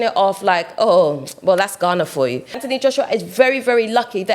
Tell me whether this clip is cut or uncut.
cut